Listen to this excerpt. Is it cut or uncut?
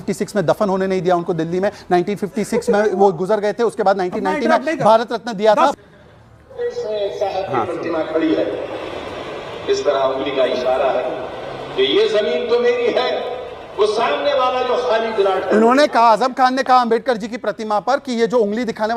uncut